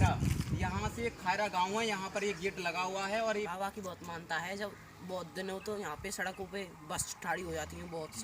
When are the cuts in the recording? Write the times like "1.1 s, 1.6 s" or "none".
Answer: 3.5 s